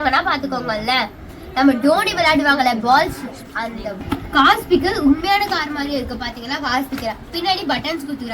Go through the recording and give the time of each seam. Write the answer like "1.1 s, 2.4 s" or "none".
4.0 s